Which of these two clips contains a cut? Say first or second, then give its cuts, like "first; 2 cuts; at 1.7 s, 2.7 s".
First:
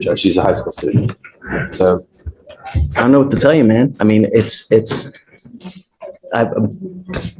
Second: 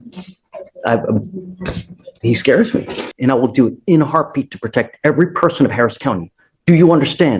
second; 1 cut; at 3.1 s